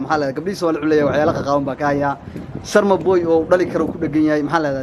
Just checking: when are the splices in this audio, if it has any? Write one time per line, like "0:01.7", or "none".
none